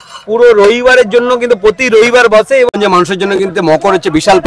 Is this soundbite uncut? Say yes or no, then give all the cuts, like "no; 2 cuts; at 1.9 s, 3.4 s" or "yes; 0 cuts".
no; 1 cut; at 2.7 s